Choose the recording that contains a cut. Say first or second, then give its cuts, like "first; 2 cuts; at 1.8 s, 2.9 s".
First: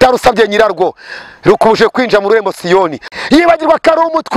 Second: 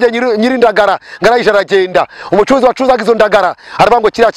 first; 1 cut; at 3.0 s